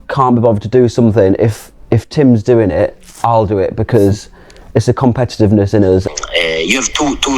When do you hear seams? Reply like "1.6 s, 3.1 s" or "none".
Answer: 6.0 s